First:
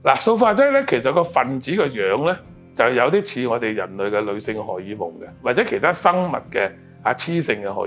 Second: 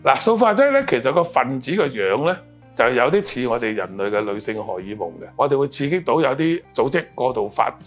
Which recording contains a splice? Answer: second; 2 cuts; at 5.3 s, 6.7 s

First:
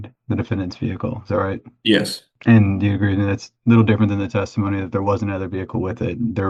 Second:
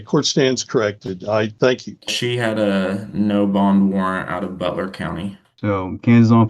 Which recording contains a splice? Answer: second; 2 cuts; at 1.9 s, 5.4 s

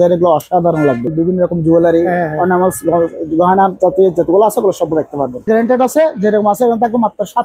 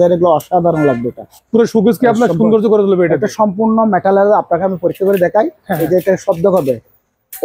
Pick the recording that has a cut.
first; 2 cuts; at 1.1 s, 5.5 s

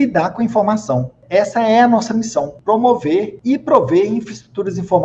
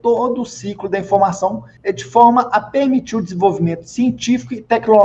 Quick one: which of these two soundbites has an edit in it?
first; 3 cuts; at 1.1 s, 2.5 s, 3.3 s

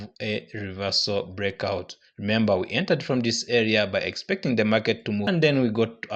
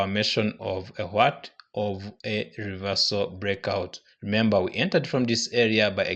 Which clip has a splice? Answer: first; 1 cut; at 5.2 s

